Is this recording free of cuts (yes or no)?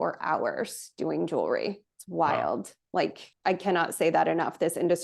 yes